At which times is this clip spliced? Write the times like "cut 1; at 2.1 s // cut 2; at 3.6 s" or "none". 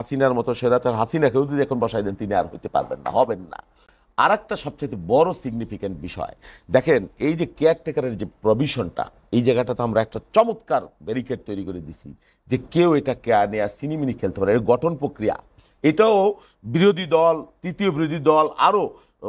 none